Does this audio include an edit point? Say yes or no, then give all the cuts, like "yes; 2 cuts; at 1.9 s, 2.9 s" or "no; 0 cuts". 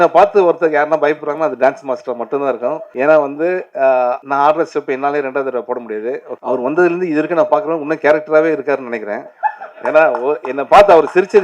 yes; 3 cuts; at 2.9 s, 4.2 s, 6.3 s